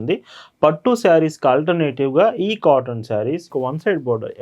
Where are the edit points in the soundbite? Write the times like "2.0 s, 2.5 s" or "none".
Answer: 3.5 s